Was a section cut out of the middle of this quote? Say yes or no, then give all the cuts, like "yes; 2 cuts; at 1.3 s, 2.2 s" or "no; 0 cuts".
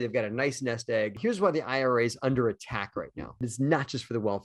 yes; 2 cuts; at 1.1 s, 3.4 s